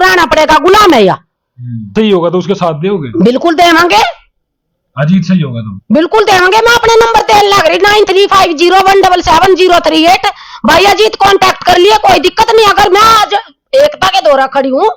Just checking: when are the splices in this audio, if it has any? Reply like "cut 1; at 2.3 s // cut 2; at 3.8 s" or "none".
cut 1; at 1.9 s

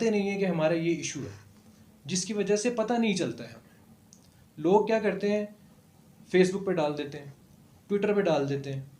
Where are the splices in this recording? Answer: none

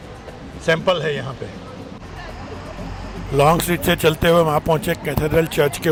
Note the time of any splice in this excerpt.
none

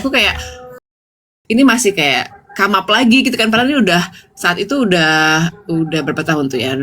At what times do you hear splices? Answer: cut 1; at 1.0 s

